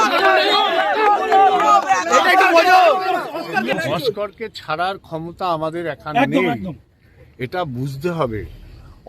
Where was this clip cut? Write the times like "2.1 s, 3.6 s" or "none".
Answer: 3.7 s